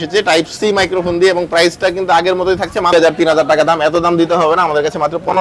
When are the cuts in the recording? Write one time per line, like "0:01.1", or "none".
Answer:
0:02.9